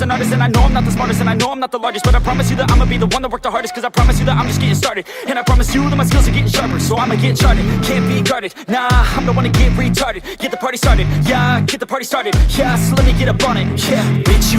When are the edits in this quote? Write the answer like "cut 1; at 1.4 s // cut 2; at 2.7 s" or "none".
cut 1; at 9.6 s